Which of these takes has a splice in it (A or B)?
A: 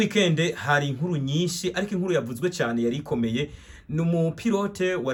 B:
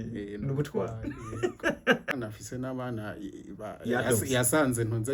B